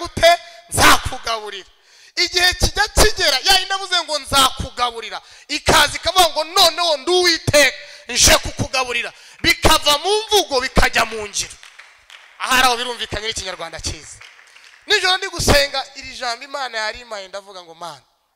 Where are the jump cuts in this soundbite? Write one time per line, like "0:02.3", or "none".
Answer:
none